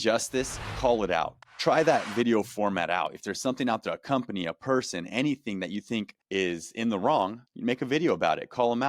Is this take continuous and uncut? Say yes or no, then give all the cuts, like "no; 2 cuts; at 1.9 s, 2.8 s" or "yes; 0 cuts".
yes; 0 cuts